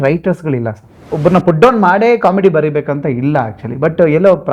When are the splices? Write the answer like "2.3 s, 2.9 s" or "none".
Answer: 1.1 s